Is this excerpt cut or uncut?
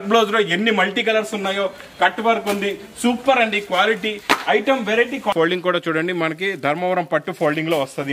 cut